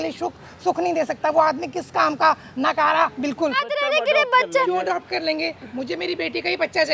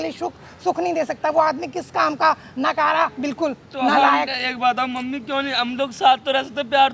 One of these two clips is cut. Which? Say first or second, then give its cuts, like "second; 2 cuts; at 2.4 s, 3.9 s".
first; 1 cut; at 3.6 s